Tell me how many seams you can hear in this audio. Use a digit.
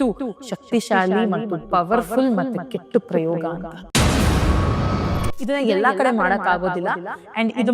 1